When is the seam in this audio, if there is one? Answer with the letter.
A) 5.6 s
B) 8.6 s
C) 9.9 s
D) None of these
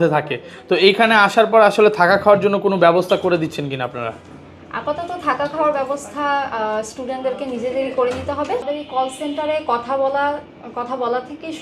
B